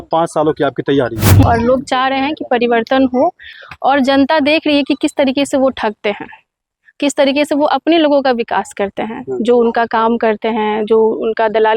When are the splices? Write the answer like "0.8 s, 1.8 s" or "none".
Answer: 1.4 s, 3.5 s